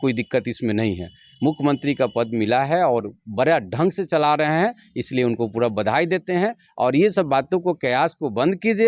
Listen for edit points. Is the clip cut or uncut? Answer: uncut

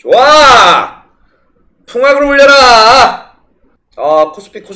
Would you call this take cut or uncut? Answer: cut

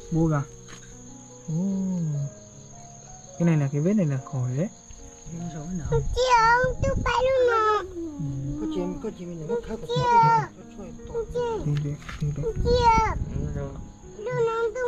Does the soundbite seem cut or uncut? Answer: uncut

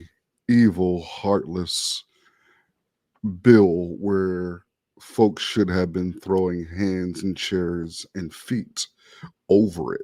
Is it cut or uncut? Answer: uncut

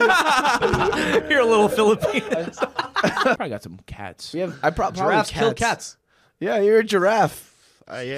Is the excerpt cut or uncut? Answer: cut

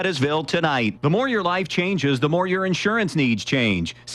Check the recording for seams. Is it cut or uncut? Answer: cut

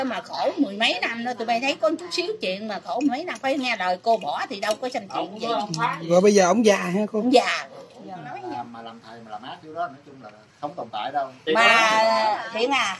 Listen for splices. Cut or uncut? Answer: cut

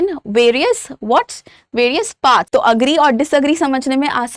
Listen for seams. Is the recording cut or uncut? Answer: cut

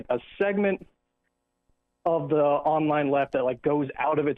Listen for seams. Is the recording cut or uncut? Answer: cut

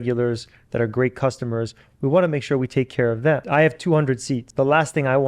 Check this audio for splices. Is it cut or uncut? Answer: cut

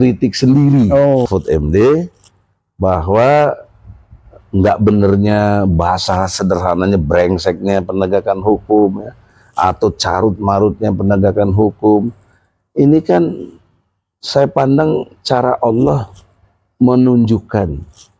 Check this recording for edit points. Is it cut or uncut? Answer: cut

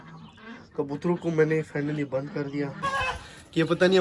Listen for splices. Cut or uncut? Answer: cut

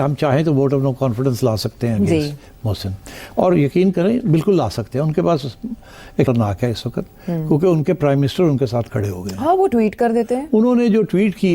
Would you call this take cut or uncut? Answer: cut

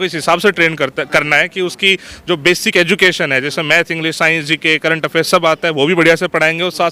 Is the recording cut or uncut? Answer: uncut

